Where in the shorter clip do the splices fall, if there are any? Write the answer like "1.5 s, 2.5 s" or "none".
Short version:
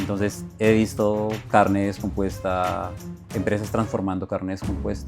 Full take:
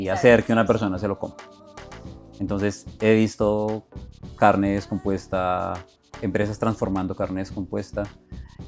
1.4 s